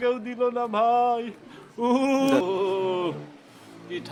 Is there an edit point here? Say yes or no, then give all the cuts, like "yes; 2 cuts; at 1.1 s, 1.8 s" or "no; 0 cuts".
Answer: no; 0 cuts